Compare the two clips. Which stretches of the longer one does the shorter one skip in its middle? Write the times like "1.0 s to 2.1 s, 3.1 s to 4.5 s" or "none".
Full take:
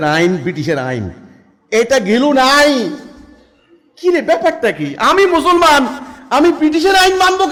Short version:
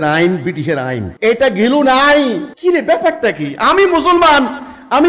1.1 s to 1.6 s, 3.0 s to 3.9 s